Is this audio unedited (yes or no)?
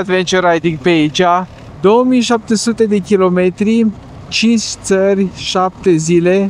no